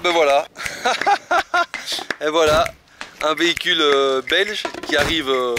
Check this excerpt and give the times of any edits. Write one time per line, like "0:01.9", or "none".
none